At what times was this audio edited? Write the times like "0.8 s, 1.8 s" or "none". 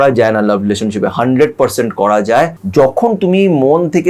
2.6 s